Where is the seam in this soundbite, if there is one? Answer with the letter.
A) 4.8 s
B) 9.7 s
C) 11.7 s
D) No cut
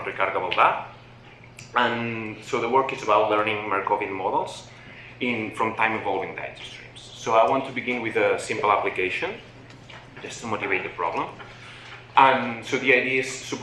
C